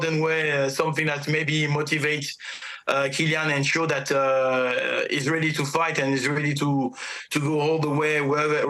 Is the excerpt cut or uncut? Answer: uncut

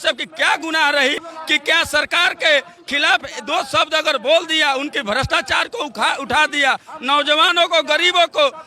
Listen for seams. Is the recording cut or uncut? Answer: cut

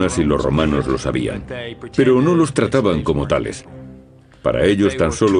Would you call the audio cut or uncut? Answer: cut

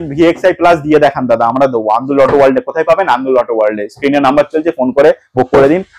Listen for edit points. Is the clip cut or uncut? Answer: uncut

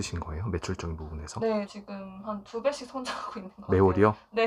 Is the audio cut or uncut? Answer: cut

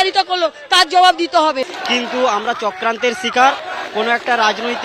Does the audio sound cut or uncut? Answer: cut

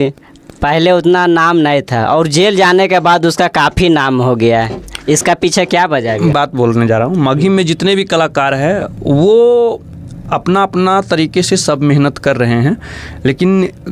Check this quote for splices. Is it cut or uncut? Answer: cut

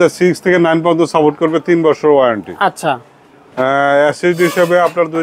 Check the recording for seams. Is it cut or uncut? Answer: uncut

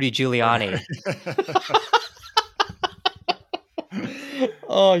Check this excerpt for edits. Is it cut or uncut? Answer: uncut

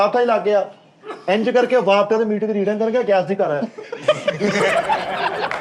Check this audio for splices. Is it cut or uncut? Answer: uncut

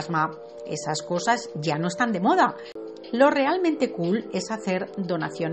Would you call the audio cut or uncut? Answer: cut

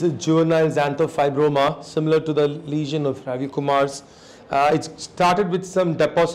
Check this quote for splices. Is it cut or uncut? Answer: uncut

